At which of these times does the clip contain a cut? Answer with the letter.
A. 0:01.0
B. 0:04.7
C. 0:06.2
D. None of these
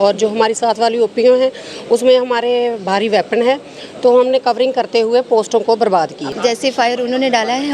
C